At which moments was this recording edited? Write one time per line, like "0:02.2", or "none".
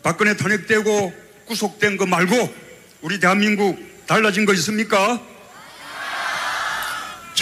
0:03.2